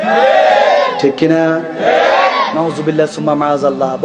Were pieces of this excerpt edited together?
yes; 1 cut; at 2.5 s

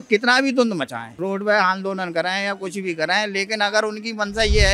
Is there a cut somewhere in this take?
yes; 1 cut; at 1.0 s

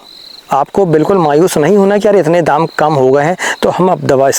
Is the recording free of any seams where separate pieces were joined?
yes; 0 cuts

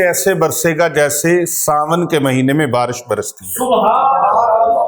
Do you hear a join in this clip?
no; 0 cuts

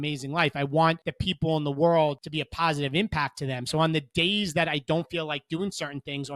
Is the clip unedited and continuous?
no; 2 cuts; at 1.1 s, 2.2 s

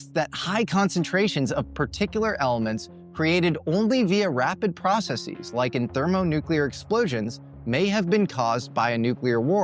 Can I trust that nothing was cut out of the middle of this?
yes; 0 cuts

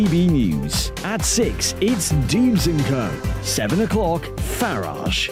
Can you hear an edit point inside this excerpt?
no; 0 cuts

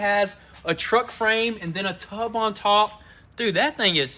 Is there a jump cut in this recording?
no; 0 cuts

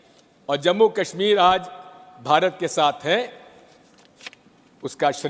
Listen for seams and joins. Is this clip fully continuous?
yes; 0 cuts

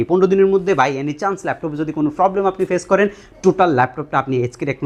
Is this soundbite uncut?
yes; 0 cuts

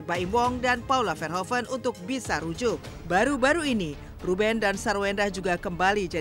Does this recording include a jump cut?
yes; 1 cut; at 2.9 s

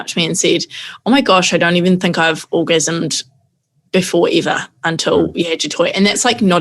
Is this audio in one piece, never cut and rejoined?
yes; 0 cuts

